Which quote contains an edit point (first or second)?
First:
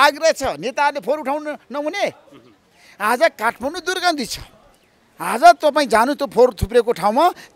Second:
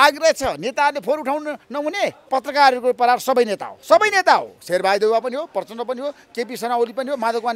second